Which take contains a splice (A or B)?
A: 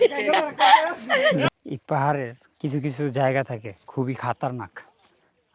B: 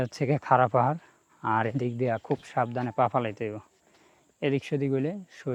A